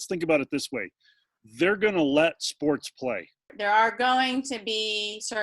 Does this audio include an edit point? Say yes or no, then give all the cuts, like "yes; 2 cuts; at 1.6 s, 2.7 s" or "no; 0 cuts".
yes; 1 cut; at 3.5 s